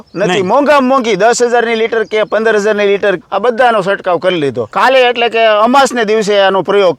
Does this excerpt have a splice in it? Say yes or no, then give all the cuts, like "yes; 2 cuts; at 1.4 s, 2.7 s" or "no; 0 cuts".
yes; 1 cut; at 4.7 s